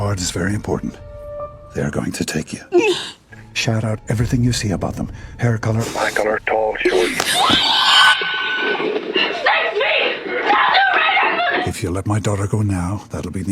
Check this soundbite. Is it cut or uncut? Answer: cut